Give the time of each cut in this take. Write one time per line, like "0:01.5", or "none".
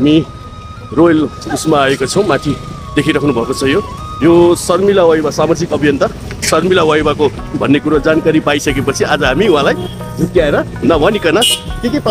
0:07.5